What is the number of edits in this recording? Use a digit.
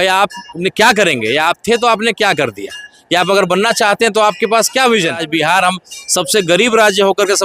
1